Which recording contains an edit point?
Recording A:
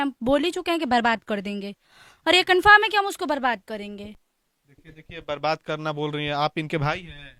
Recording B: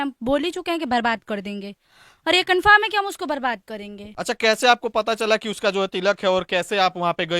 B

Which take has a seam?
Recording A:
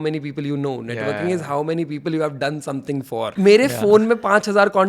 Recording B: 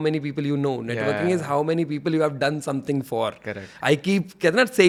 A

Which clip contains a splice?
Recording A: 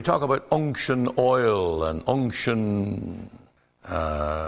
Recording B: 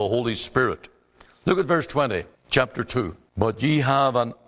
B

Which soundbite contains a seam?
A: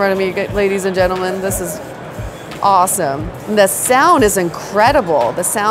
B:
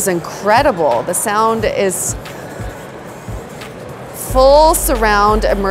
A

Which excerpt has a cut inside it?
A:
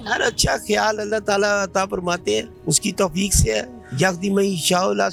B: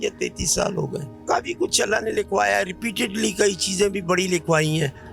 B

